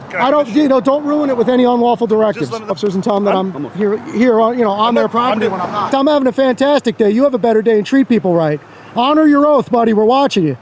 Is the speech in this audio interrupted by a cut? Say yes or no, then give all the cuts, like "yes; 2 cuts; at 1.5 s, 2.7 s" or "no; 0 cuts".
yes; 2 cuts; at 2.8 s, 5.9 s